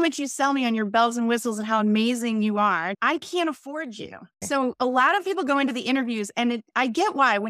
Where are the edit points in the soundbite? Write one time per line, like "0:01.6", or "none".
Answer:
0:03.0
0:04.4